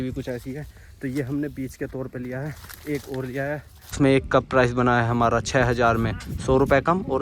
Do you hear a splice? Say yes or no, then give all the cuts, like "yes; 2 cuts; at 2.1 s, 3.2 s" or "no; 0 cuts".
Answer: yes; 1 cut; at 4.0 s